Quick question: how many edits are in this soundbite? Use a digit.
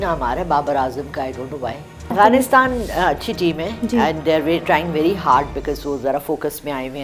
1